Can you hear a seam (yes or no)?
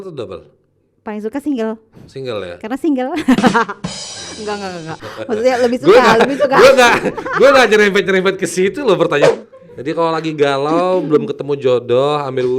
yes